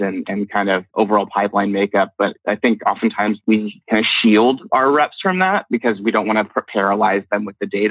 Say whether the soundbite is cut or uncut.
cut